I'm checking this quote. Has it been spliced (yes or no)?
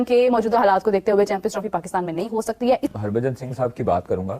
yes